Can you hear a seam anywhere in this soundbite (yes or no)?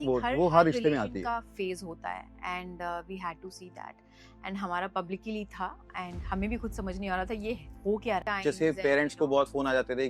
yes